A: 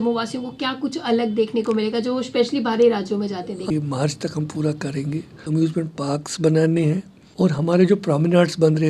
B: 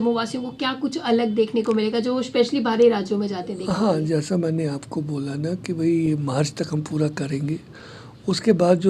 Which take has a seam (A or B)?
A